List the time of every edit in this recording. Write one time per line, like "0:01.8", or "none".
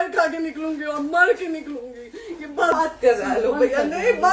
0:02.7